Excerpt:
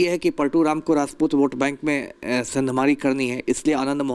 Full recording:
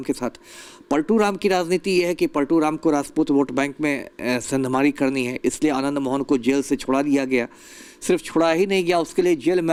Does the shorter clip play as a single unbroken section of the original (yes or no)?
yes